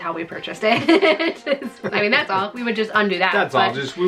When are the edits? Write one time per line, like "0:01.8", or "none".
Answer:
0:01.9